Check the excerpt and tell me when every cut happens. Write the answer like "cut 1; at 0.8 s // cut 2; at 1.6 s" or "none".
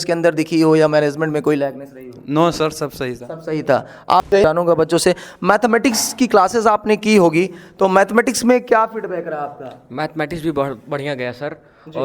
cut 1; at 4.4 s